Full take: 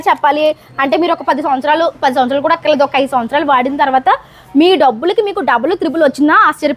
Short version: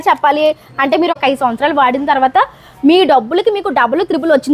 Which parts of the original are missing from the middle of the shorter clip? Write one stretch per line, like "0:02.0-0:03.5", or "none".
0:01.2-0:02.9